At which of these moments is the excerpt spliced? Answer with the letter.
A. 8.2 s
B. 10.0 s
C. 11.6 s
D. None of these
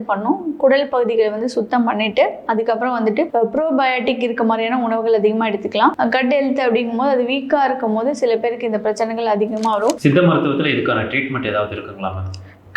B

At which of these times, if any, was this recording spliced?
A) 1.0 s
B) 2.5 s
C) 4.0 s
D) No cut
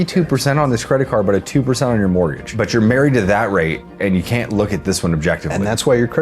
B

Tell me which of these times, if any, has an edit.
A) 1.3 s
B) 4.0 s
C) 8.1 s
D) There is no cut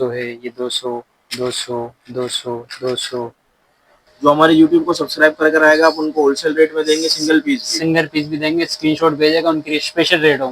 B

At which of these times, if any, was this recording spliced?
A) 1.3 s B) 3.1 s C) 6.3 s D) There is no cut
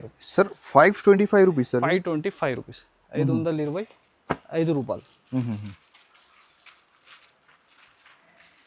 D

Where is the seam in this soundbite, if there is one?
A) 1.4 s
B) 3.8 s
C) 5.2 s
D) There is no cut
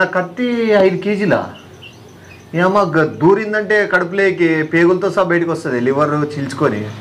A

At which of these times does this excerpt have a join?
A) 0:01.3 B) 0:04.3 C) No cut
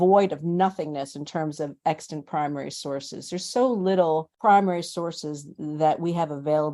B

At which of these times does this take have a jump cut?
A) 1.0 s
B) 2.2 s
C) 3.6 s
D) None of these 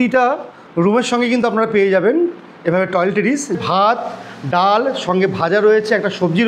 C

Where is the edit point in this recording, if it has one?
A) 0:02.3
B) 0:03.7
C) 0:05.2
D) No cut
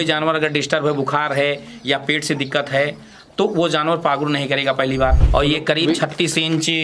C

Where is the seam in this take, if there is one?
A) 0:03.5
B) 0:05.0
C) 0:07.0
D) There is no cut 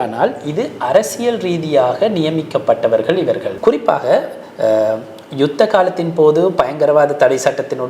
A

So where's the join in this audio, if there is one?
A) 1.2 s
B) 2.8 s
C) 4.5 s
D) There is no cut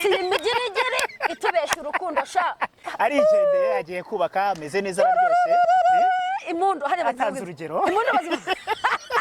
B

